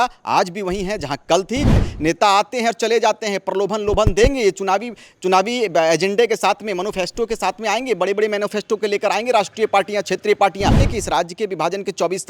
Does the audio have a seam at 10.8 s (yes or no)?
yes